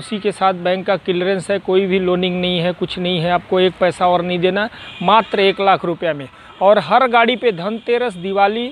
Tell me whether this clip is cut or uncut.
uncut